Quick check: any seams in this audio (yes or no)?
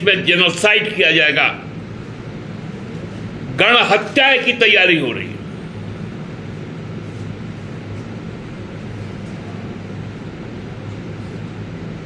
no